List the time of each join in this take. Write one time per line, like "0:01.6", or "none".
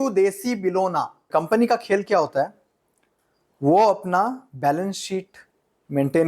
0:01.2